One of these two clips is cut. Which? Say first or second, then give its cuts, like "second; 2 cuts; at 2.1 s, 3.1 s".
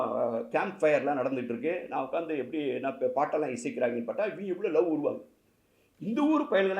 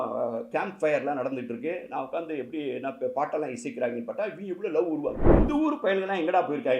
second; 1 cut; at 5.2 s